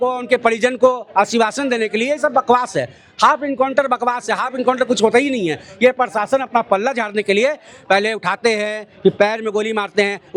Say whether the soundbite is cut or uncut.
uncut